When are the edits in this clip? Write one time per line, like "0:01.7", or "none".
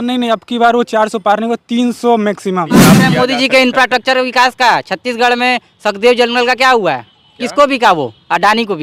0:02.9